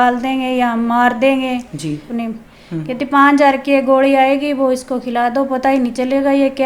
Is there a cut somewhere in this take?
yes; 1 cut; at 2.1 s

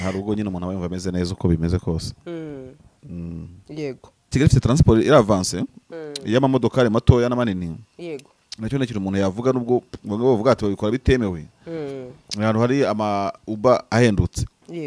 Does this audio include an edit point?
yes; 1 cut; at 4.3 s

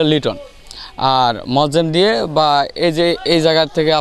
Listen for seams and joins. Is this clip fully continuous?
yes; 0 cuts

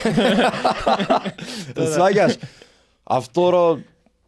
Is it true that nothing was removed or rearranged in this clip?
yes; 0 cuts

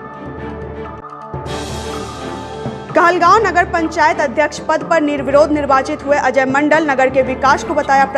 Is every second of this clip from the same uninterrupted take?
no; 1 cut; at 2.8 s

